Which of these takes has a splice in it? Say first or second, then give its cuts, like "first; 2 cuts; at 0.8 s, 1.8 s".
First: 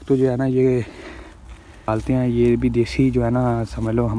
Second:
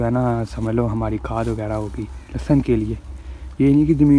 first; 1 cut; at 1.9 s